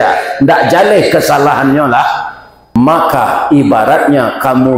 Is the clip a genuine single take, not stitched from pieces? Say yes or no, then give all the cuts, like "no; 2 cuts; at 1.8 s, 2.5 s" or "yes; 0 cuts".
no; 1 cut; at 2.8 s